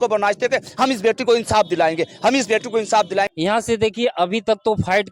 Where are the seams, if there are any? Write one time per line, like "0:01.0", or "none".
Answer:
0:03.3